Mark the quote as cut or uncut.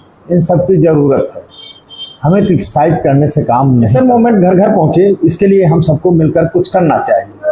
cut